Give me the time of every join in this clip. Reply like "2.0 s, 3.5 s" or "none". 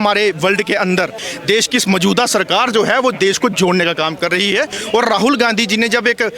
1.3 s, 4.8 s